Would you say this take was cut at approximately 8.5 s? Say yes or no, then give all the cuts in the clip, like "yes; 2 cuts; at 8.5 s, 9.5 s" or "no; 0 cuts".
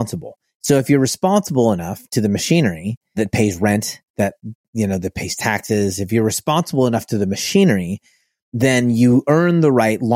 no; 1 cut; at 3.2 s